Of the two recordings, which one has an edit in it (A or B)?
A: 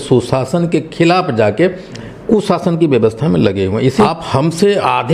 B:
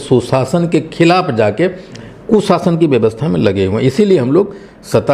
A